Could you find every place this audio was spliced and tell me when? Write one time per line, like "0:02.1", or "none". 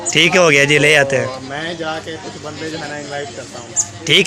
none